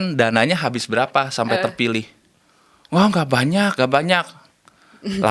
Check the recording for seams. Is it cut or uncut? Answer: uncut